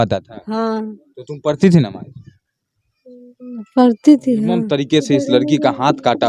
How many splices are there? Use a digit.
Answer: 1